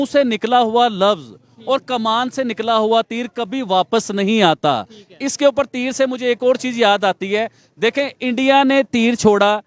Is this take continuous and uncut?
yes; 0 cuts

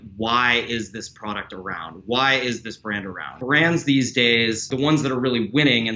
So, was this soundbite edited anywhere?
yes; 2 cuts; at 3.3 s, 4.7 s

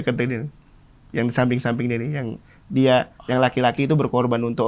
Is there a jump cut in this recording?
no; 0 cuts

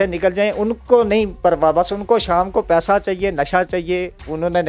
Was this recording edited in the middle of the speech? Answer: no; 0 cuts

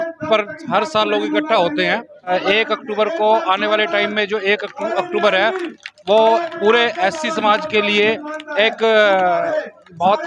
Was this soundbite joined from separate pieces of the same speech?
yes; 1 cut; at 2.3 s

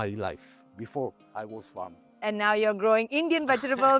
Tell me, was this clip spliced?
yes; 1 cut; at 1.2 s

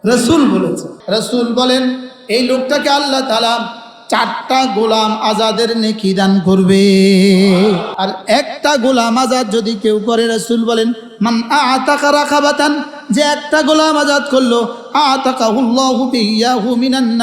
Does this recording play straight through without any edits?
no; 2 cuts; at 0.9 s, 7.9 s

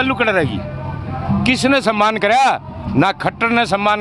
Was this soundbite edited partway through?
no; 0 cuts

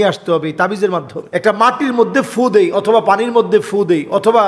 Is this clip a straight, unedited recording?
no; 1 cut; at 1.2 s

